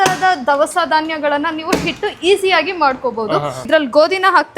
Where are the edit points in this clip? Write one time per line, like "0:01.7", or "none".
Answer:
0:03.7